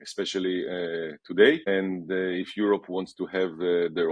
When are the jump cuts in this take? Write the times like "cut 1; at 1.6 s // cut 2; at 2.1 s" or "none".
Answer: cut 1; at 1.6 s

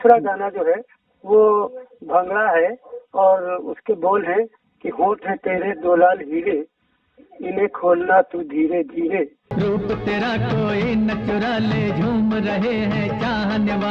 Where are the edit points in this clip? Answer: cut 1; at 6.8 s // cut 2; at 9.4 s

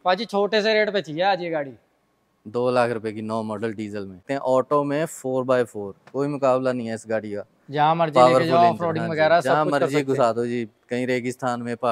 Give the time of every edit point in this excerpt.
cut 1; at 4.2 s

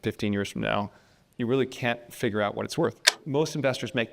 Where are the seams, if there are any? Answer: cut 1; at 3.2 s

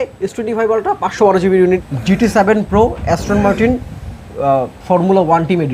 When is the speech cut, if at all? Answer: cut 1; at 1.8 s

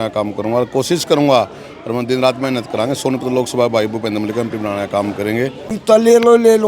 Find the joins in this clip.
cut 1; at 5.8 s

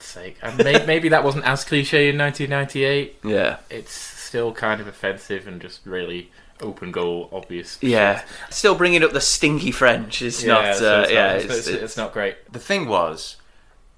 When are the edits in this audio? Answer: cut 1; at 8.5 s // cut 2; at 12.4 s

